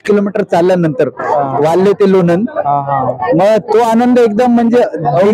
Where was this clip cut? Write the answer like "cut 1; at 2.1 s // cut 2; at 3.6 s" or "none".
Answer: none